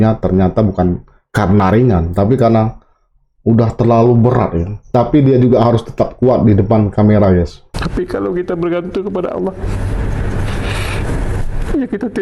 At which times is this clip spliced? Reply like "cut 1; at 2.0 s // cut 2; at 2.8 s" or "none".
cut 1; at 4.9 s // cut 2; at 7.7 s